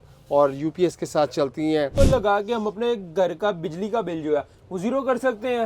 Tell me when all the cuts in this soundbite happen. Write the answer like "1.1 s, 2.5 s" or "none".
1.9 s